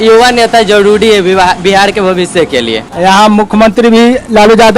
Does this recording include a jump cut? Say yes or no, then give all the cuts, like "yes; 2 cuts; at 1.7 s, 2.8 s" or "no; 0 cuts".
yes; 1 cut; at 2.8 s